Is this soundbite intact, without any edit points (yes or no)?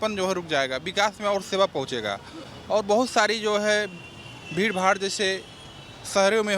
yes